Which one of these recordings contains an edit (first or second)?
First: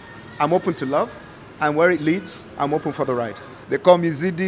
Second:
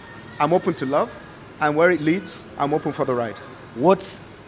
first